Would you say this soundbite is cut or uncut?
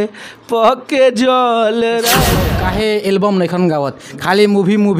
cut